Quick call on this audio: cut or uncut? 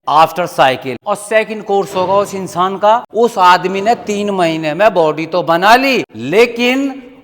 cut